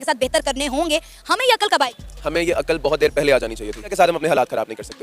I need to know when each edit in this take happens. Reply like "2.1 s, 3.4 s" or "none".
3.9 s